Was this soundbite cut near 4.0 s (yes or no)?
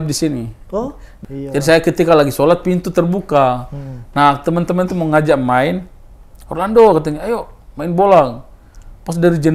no